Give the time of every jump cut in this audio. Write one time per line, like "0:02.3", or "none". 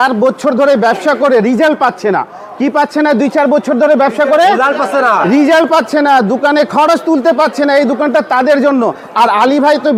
none